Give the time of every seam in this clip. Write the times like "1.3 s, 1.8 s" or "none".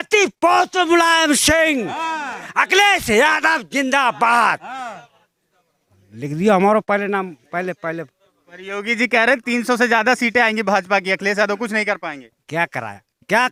none